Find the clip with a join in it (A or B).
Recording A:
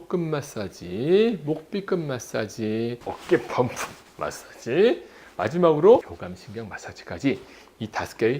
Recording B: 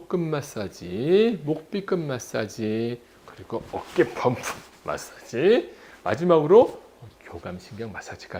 A